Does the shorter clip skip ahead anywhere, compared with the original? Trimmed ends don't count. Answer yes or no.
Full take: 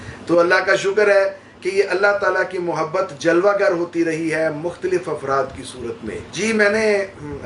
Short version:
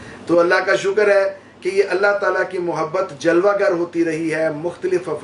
no